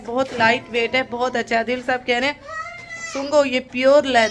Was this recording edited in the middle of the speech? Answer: no; 0 cuts

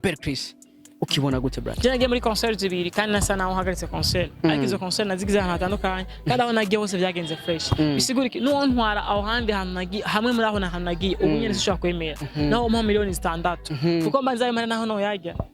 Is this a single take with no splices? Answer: no; 1 cut; at 1.8 s

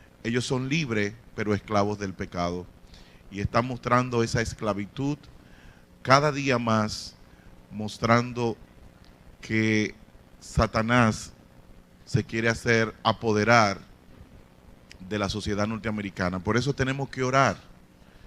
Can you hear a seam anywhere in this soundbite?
yes; 1 cut; at 16.5 s

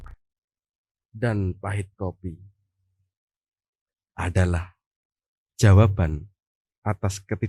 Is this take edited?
no; 0 cuts

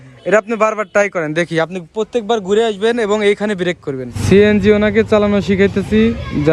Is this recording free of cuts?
no; 1 cut; at 4.2 s

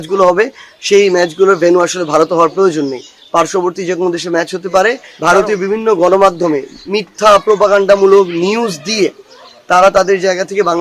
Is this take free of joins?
no; 1 cut; at 5.1 s

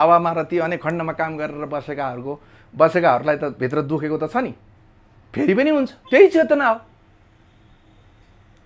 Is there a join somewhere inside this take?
no; 0 cuts

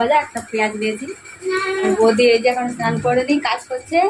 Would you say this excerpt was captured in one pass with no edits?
no; 1 cut; at 1.9 s

